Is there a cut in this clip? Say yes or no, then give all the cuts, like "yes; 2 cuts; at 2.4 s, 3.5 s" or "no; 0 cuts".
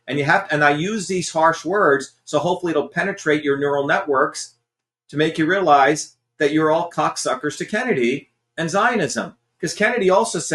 no; 0 cuts